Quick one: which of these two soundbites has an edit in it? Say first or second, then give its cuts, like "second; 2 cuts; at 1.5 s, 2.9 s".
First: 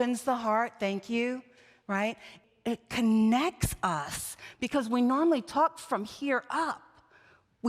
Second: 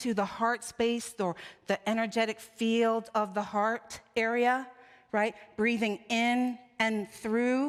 first; 1 cut; at 2.3 s